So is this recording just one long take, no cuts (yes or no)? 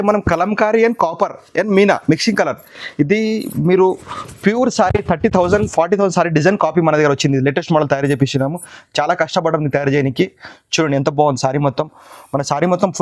yes